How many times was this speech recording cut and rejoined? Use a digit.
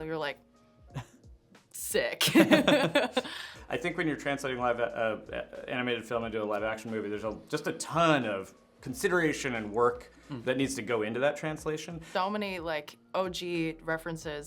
2